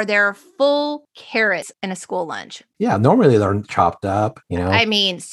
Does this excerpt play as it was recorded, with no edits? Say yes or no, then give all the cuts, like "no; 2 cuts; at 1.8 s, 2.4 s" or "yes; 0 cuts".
yes; 0 cuts